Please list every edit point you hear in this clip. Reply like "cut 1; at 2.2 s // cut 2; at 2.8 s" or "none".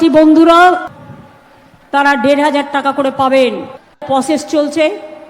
cut 1; at 4.0 s